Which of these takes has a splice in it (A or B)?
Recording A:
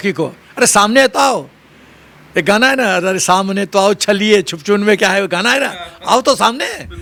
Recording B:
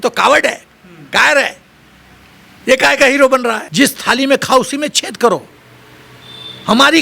B